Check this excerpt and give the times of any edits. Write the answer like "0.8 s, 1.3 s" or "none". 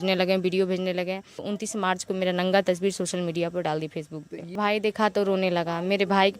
1.5 s, 4.6 s